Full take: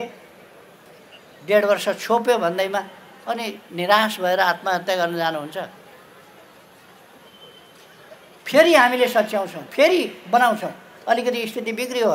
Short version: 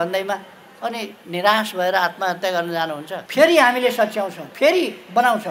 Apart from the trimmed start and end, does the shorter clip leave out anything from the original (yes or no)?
yes